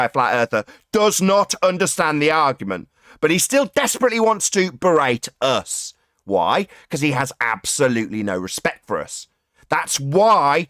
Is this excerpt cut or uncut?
uncut